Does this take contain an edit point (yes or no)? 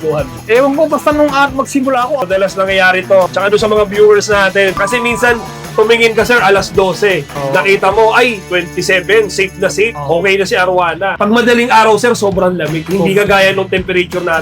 yes